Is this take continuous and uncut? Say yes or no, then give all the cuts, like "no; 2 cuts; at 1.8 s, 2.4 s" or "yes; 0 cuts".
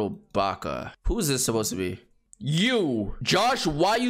no; 2 cuts; at 0.9 s, 3.2 s